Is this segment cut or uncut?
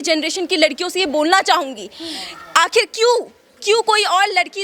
uncut